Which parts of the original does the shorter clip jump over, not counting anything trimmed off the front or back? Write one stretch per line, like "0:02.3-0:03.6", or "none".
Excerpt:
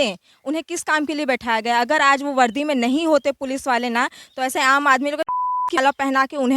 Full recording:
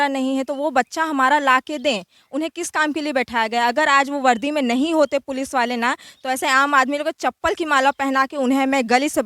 0:07.5-0:07.7